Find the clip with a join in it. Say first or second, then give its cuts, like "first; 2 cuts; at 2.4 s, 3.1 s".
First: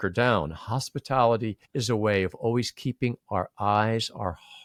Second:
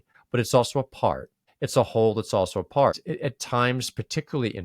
second; 1 cut; at 3.1 s